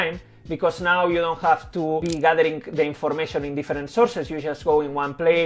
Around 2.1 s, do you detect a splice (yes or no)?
yes